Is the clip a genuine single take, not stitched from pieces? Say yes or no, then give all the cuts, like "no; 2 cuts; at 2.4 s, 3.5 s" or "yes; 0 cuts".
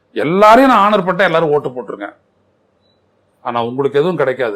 yes; 0 cuts